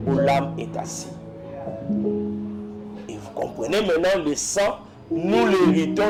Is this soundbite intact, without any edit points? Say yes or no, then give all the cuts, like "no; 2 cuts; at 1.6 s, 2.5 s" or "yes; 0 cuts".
yes; 0 cuts